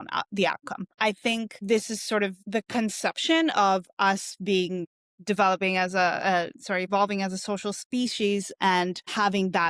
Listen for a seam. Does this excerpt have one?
no; 0 cuts

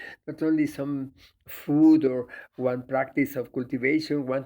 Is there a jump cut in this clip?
yes; 1 cut; at 2.1 s

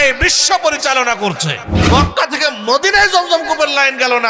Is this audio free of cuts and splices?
no; 1 cut; at 1.7 s

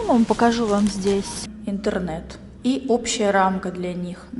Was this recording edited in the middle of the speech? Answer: yes; 1 cut; at 1.5 s

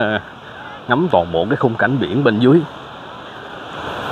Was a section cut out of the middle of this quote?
no; 0 cuts

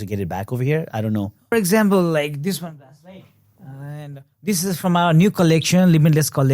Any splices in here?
yes; 1 cut; at 1.5 s

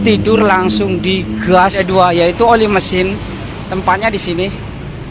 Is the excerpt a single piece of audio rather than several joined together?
no; 1 cut; at 1.8 s

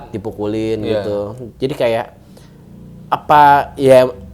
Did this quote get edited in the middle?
no; 0 cuts

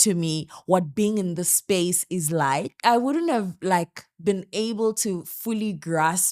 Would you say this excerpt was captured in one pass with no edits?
no; 1 cut; at 2.8 s

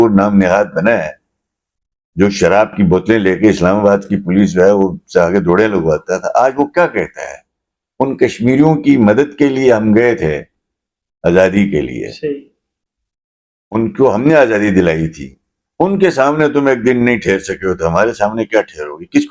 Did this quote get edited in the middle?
no; 0 cuts

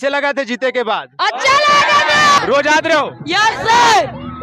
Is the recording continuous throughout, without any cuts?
no; 1 cut; at 2.4 s

